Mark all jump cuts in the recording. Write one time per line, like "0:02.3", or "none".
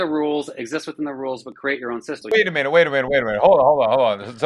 0:02.2